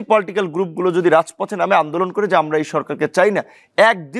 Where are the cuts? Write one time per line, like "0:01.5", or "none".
none